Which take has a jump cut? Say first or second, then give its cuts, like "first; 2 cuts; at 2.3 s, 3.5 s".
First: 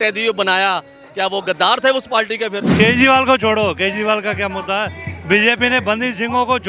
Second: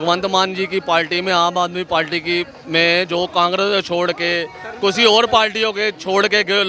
first; 1 cut; at 2.7 s